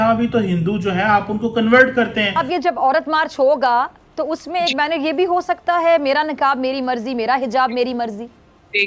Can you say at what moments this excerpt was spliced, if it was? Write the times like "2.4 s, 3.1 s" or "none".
2.4 s